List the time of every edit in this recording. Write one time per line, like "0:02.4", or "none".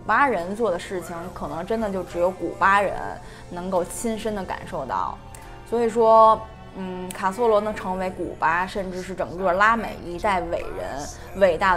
none